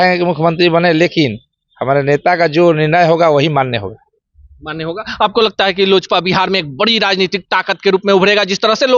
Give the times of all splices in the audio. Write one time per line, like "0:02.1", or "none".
none